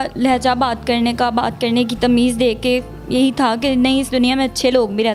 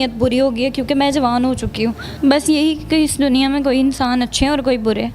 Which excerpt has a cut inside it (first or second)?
second